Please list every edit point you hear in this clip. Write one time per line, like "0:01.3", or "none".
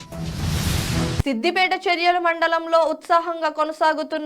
0:01.2

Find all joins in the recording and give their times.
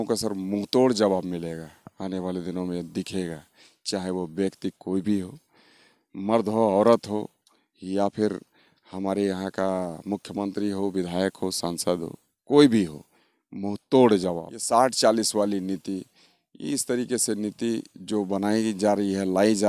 0:14.5

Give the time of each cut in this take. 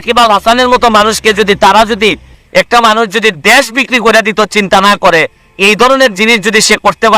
0:02.3

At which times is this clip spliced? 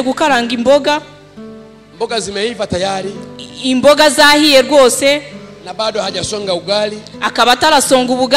none

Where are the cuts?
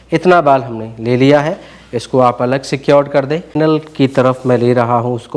0:03.4

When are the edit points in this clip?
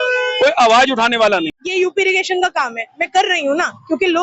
0:01.6

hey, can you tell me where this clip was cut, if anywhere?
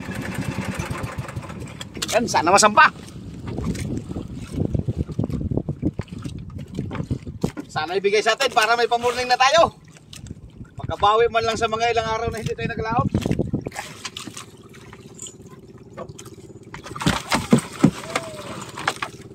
0:13.7

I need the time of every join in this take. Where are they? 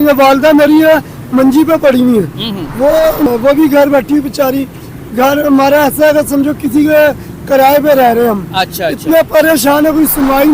0:03.3

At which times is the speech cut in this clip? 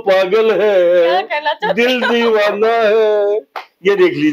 none

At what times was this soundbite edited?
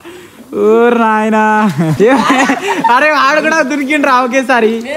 0:01.9

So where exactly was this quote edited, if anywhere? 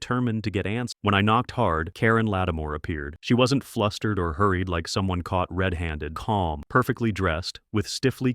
0:00.9
0:06.1

